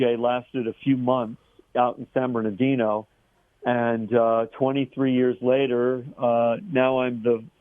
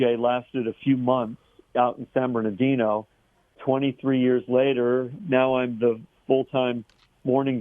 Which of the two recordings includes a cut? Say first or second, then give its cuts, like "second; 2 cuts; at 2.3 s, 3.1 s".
second; 2 cuts; at 3.6 s, 5.2 s